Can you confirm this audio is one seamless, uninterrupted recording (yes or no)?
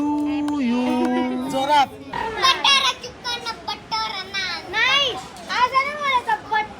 no